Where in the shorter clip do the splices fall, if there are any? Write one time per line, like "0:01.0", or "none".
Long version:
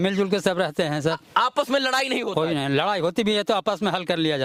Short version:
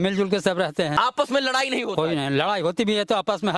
0:00.9